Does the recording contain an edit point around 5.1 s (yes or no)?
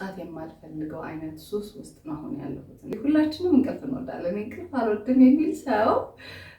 no